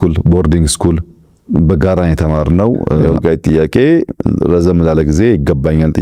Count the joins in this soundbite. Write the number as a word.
one